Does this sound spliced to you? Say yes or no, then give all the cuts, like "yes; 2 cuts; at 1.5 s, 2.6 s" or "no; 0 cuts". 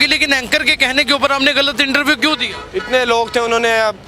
no; 0 cuts